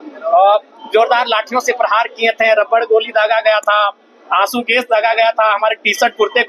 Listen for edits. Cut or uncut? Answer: uncut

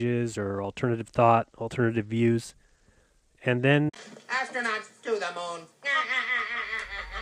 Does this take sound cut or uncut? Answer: uncut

